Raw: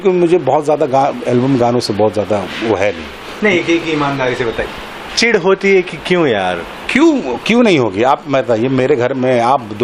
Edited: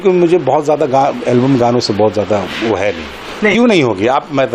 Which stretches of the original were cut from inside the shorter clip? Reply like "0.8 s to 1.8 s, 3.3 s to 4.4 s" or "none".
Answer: 3.5 s to 7.5 s